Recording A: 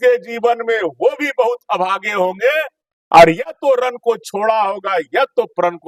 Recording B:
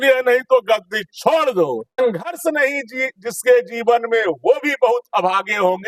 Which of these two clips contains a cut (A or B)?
B